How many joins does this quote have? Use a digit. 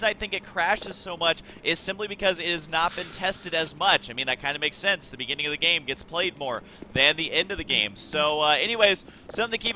1